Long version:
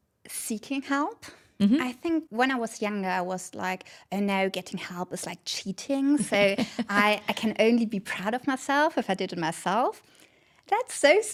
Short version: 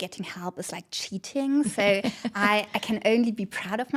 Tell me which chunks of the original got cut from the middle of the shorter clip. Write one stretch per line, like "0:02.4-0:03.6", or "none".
none